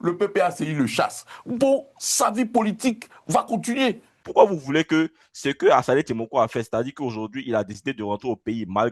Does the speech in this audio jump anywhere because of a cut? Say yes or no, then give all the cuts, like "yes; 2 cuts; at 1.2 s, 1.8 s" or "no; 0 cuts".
yes; 1 cut; at 4.1 s